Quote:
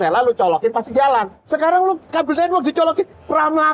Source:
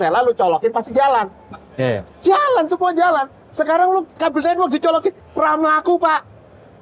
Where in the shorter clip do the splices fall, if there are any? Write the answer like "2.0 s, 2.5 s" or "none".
1.4 s